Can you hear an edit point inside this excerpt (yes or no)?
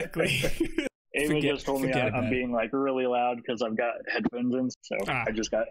yes